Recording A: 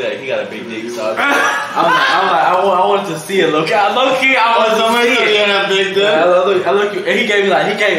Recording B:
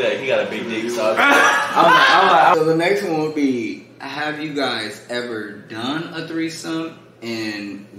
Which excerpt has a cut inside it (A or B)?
B